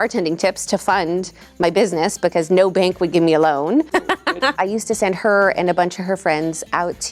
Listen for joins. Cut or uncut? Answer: cut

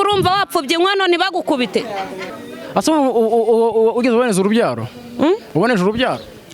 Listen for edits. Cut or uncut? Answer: cut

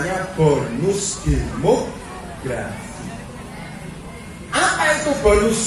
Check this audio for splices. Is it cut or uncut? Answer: uncut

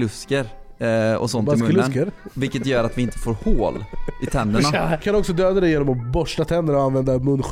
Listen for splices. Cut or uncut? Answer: cut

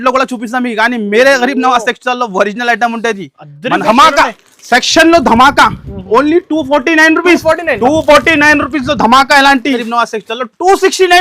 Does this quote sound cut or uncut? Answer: cut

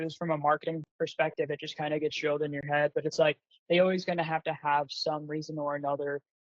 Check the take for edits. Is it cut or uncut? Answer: uncut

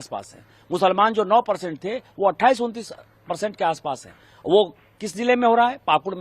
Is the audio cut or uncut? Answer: uncut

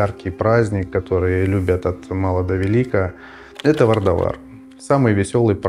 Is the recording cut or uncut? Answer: uncut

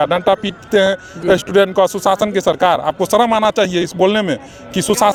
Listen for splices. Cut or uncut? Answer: uncut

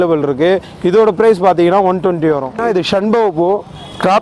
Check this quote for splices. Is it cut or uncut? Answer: cut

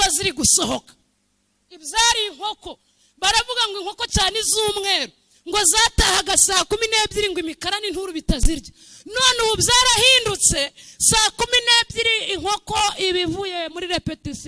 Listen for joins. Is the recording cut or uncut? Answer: uncut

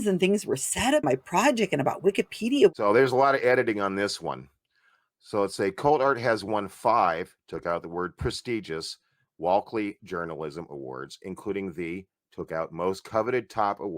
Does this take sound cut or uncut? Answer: cut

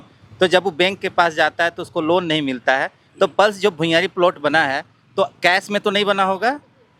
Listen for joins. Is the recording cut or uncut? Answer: uncut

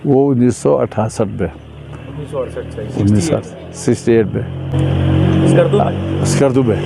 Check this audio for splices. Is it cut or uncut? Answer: uncut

